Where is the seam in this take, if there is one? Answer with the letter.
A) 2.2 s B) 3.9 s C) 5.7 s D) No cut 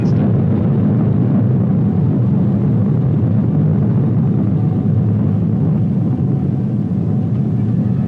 C